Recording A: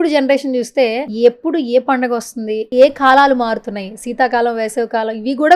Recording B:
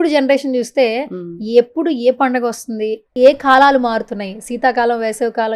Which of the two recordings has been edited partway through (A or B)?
A